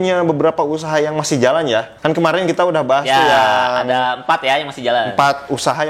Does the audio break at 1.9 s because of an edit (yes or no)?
yes